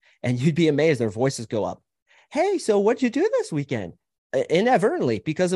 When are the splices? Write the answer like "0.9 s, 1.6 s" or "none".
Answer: none